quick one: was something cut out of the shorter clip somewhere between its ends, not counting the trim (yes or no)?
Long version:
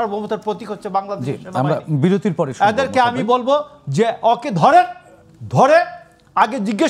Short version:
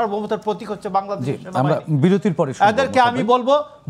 no